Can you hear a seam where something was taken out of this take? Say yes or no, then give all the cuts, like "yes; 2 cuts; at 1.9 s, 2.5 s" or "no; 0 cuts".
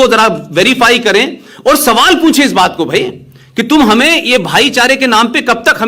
no; 0 cuts